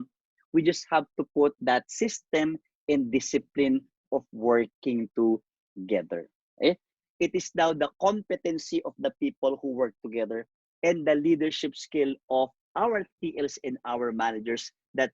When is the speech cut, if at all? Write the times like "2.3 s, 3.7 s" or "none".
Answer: 6.9 s

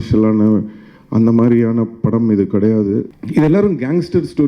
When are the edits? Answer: 3.1 s

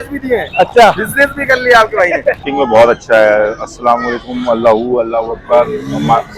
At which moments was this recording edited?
2.4 s

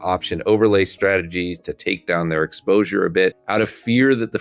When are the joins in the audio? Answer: 3.4 s

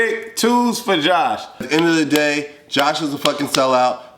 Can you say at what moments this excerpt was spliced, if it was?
1.6 s

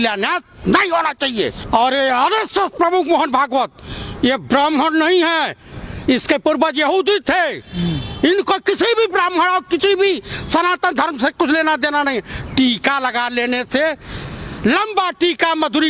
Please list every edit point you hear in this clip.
1.6 s

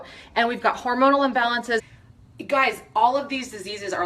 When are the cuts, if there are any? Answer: 1.9 s

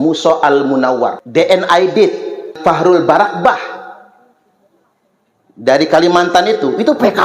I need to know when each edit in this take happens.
1.2 s, 2.6 s

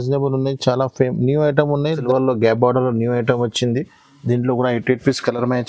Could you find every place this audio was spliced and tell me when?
2.0 s

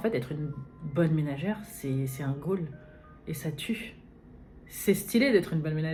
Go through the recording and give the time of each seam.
none

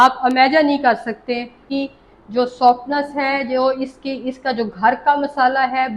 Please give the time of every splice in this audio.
1.6 s

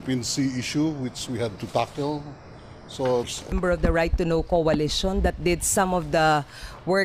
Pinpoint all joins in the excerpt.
none

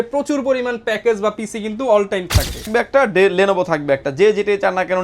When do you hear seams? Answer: 2.7 s

